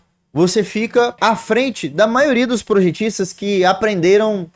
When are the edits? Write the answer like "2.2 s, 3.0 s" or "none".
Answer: 1.2 s